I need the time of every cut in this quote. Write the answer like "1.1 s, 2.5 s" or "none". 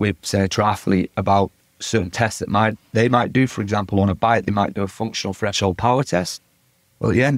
none